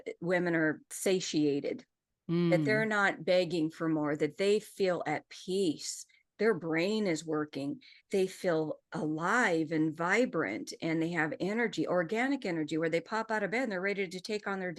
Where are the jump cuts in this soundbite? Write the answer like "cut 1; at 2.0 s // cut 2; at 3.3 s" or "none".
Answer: none